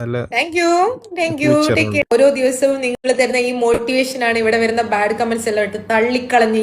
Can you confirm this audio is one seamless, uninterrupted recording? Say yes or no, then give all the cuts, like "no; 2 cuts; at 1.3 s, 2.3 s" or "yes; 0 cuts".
no; 1 cut; at 2.0 s